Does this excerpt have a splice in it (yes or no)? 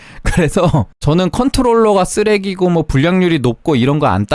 yes